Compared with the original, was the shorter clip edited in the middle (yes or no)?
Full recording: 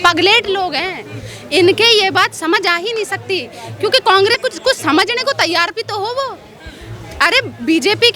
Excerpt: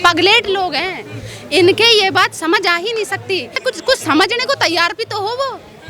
yes